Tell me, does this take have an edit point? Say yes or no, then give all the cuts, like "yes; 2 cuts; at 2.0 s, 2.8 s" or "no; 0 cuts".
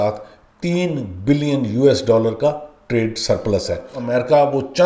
yes; 1 cut; at 3.9 s